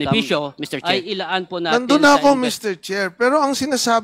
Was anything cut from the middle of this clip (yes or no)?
yes